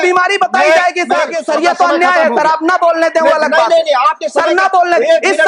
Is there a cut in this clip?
yes; 1 cut; at 1.4 s

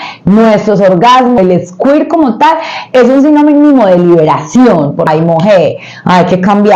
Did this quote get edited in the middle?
yes; 2 cuts; at 1.4 s, 5.1 s

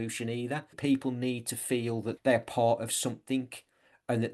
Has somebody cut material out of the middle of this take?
yes; 2 cuts; at 0.8 s, 2.1 s

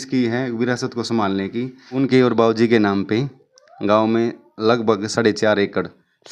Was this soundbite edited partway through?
yes; 1 cut; at 2.0 s

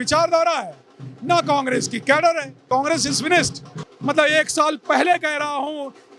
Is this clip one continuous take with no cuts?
no; 2 cuts; at 2.6 s, 3.9 s

